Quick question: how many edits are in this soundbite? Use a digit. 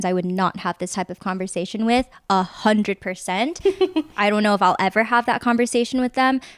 0